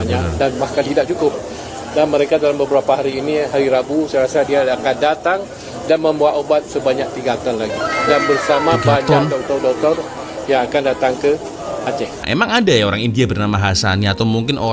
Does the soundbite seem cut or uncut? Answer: cut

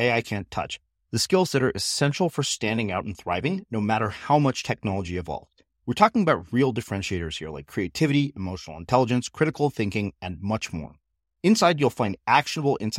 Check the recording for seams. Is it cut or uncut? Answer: uncut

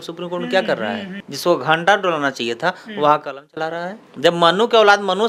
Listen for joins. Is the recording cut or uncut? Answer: uncut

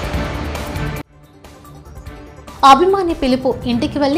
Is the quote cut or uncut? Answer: cut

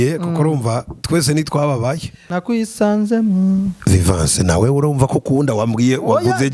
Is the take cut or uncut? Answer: cut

